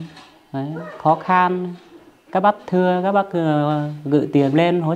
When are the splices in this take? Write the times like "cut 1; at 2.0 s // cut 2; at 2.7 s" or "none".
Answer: none